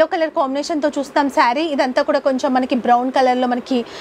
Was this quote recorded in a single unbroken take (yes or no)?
yes